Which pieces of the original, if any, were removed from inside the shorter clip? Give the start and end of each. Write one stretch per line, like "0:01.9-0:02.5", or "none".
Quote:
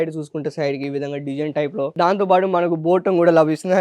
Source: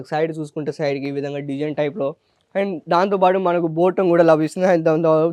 0:02.1-0:02.8

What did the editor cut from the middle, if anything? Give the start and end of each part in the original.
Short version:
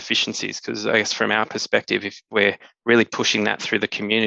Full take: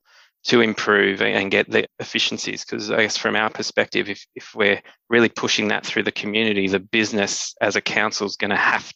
0:04.2-0:04.4

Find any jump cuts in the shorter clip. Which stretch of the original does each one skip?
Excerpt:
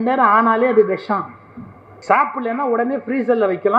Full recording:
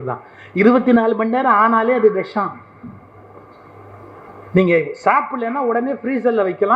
0:03.2-0:04.9

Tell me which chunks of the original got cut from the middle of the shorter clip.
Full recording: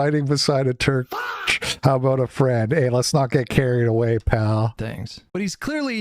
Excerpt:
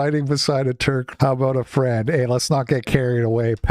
0:01.1-0:01.7

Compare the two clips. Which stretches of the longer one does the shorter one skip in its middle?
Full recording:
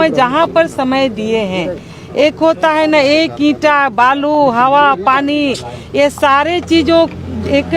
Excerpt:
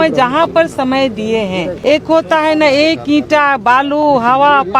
0:01.7-0:02.1

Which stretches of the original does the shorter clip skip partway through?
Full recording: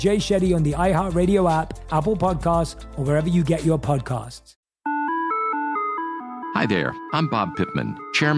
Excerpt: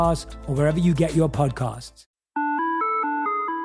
none

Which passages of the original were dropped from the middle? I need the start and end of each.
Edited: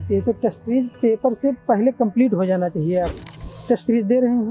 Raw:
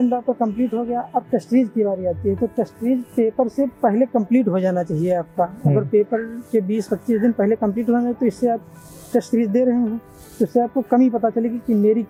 0:05.3-0:08.6

